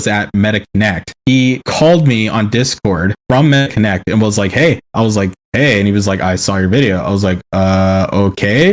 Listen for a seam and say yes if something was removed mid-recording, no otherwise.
no